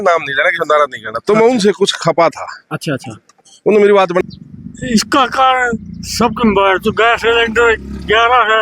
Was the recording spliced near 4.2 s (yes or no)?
yes